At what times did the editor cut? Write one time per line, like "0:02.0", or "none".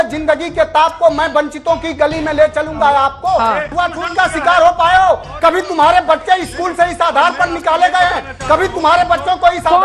0:03.7